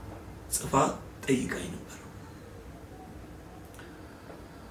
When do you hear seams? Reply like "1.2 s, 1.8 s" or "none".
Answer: none

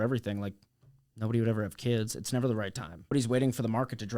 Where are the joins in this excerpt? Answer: 3.1 s

